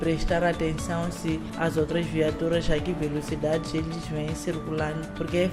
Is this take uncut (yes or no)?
yes